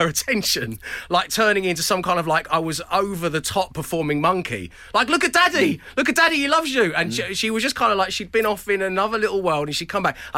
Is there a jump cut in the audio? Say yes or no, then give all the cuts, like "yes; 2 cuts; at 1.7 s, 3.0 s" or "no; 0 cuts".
no; 0 cuts